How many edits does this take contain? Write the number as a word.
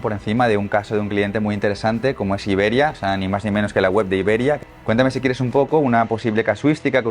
one